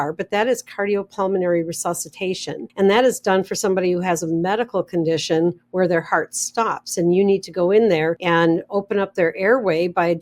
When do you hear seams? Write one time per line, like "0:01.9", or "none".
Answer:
0:02.6
0:08.2